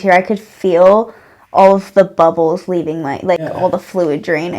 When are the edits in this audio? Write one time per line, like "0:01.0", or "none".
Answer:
0:03.4